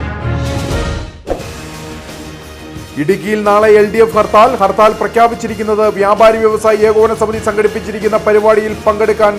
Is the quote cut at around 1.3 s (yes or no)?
yes